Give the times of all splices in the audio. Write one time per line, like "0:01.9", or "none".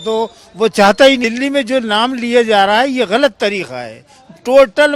0:01.2